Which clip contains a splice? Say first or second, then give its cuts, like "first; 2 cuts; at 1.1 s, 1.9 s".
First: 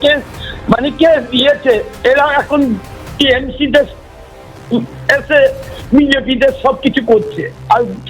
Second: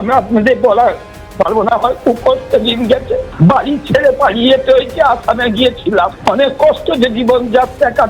second; 2 cuts; at 3.3 s, 6.1 s